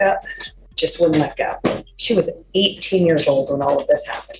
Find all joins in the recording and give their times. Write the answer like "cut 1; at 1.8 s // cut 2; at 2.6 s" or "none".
none

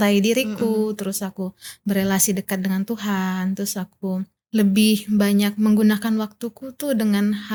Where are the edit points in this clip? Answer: none

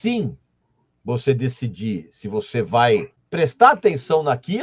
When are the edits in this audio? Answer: cut 1; at 3.2 s

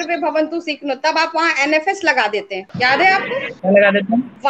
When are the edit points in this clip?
none

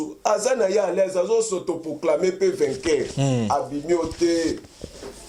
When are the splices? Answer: none

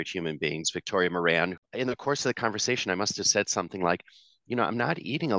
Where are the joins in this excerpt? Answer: cut 1; at 1.6 s

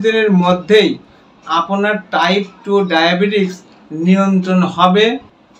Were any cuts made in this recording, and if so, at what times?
none

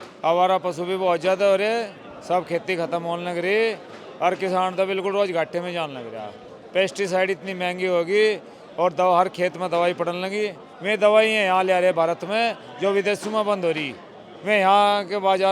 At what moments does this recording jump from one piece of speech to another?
none

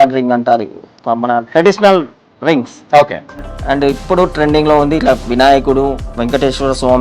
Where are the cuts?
cut 1; at 6.1 s

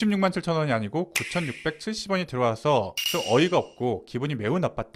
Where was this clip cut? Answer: none

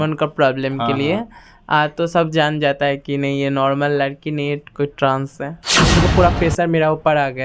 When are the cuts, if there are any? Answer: cut 1; at 5.9 s

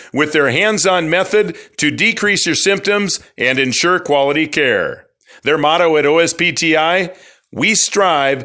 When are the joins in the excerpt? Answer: none

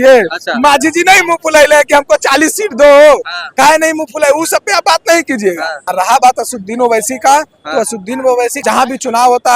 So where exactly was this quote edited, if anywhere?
cut 1; at 5.7 s // cut 2; at 8.6 s

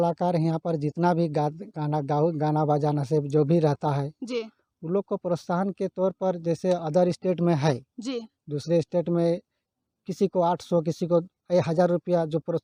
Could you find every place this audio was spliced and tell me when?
none

